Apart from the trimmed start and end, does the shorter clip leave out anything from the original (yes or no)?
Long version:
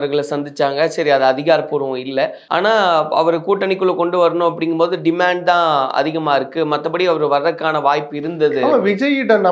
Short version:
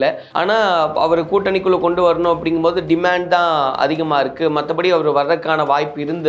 no